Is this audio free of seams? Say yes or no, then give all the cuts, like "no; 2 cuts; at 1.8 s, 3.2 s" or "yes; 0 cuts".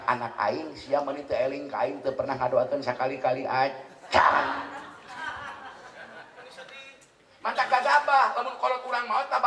yes; 0 cuts